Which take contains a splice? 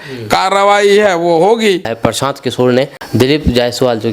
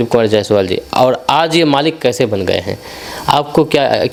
first; 2 cuts; at 1.9 s, 3.0 s

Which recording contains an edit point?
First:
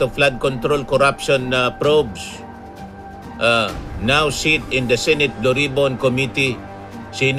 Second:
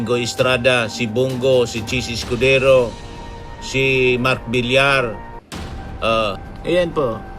second; 1 cut; at 6.4 s

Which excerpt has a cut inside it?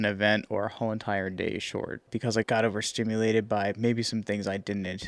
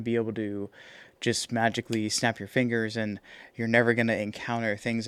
first; 1 cut; at 2.4 s

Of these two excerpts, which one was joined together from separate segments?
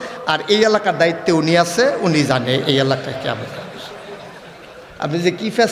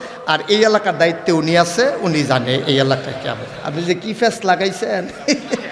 second; 1 cut; at 3.5 s

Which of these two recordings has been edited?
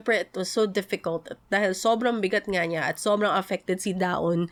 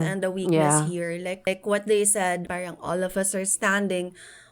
second; 2 cuts; at 1.4 s, 2.5 s

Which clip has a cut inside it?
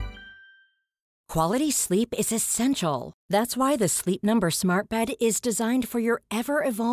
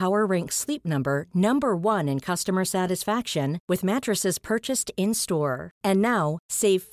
first; 1 cut; at 1.2 s

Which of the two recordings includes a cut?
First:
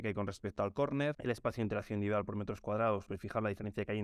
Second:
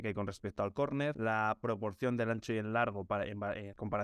first; 2 cuts; at 1.2 s, 3.0 s

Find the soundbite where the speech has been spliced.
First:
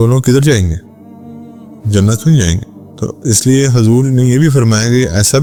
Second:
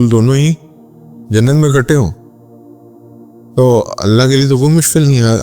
second; 2 cuts; at 2.2 s, 3.5 s

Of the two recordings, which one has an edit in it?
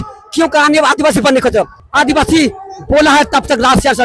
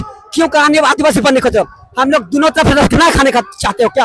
first; 1 cut; at 1.8 s

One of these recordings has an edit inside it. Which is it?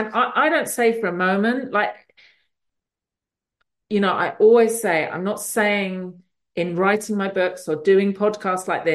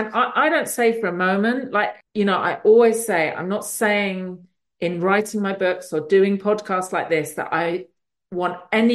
second; 1 cut; at 2.0 s

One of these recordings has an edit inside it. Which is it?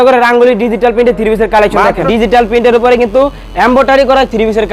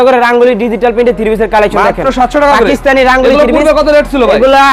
first; 1 cut; at 2.3 s

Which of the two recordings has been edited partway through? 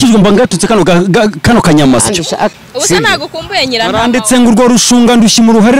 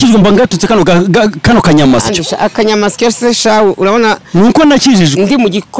first; 1 cut; at 2.5 s

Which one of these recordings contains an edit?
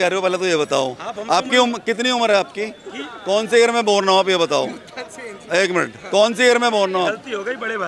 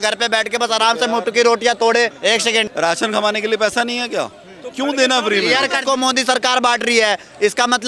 second; 2 cuts; at 2.4 s, 5.8 s

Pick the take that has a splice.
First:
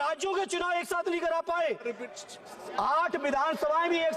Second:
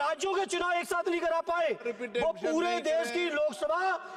first; 1 cut; at 2.0 s

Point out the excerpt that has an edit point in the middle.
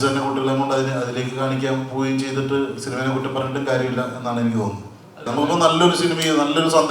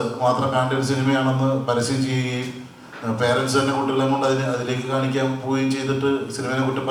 first; 1 cut; at 5.3 s

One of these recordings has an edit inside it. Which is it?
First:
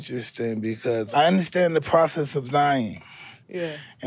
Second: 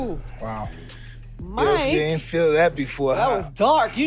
first; 1 cut; at 1.1 s

